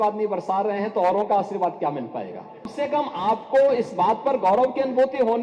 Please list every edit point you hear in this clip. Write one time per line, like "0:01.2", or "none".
0:02.7